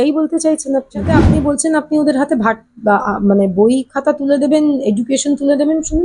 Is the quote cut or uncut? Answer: cut